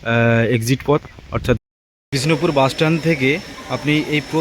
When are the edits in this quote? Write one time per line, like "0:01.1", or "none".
0:01.6

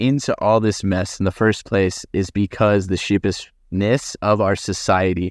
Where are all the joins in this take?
none

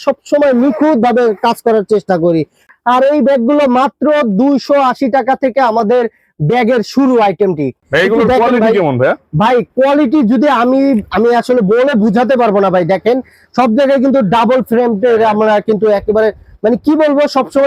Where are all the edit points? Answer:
0:02.7
0:07.9

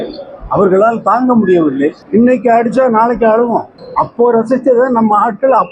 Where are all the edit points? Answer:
0:02.0
0:03.8

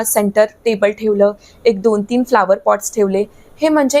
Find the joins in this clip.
none

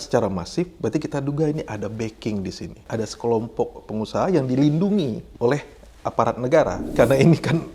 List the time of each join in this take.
0:02.9
0:03.8
0:05.2
0:06.9

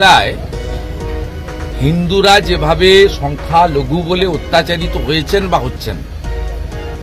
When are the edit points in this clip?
none

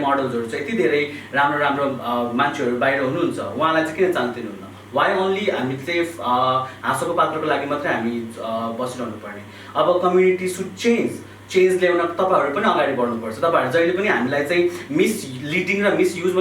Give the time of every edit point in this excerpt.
none

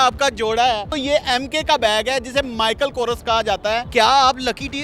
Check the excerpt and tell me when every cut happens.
0:00.9
0:03.9

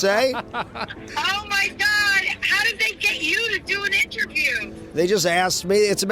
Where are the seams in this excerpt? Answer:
0:01.0
0:04.9

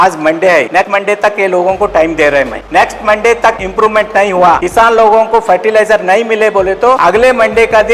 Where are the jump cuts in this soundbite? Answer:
0:00.8
0:02.6
0:03.6
0:04.6
0:07.0

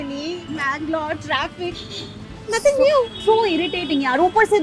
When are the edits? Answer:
none

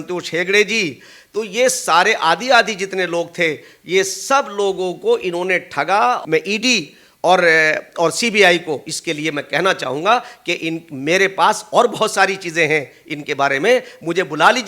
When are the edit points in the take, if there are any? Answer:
0:06.2

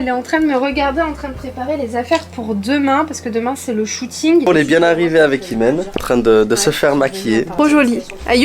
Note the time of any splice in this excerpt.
0:04.5
0:07.5

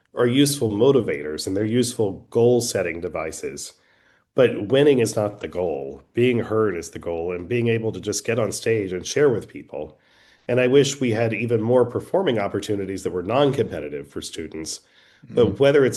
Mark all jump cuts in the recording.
none

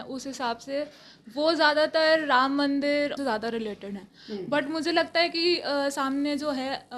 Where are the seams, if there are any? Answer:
0:03.2

